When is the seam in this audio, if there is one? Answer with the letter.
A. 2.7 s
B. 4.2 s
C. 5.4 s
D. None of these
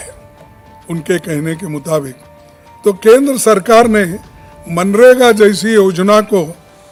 D